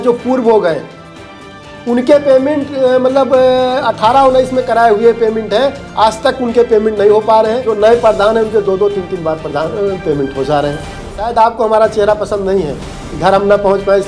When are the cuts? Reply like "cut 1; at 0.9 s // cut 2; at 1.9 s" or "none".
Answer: cut 1; at 7.6 s // cut 2; at 11.2 s